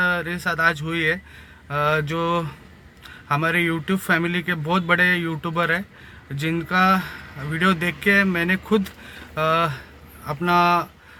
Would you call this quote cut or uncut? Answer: uncut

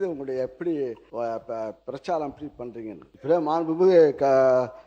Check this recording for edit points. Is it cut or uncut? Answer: cut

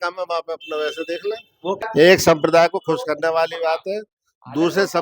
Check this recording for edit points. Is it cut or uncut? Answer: cut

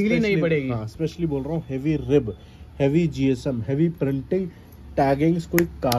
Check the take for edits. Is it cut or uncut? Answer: uncut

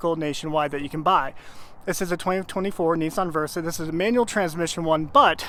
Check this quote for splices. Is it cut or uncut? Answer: uncut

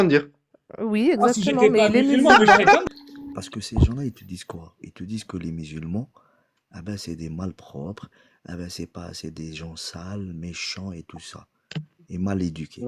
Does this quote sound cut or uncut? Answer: cut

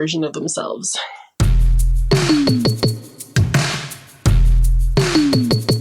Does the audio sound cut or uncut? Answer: cut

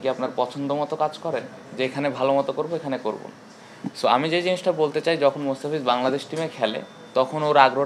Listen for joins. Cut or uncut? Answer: uncut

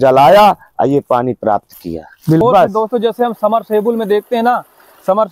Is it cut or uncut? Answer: cut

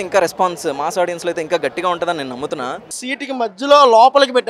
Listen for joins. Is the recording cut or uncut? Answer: cut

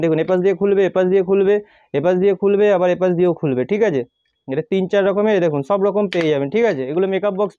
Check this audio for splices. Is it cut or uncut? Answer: uncut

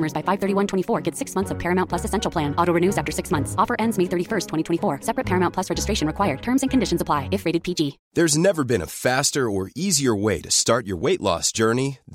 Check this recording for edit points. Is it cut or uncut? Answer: cut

